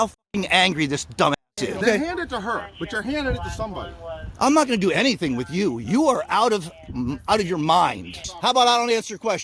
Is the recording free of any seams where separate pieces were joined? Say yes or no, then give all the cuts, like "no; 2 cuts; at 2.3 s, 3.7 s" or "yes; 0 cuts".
no; 2 cuts; at 1.6 s, 8.2 s